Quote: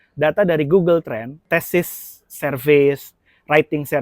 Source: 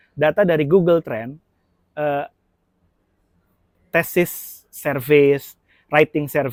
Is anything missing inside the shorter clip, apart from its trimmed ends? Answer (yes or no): yes